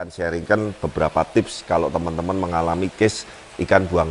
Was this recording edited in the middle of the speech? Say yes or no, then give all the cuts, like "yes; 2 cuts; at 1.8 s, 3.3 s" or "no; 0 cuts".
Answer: no; 0 cuts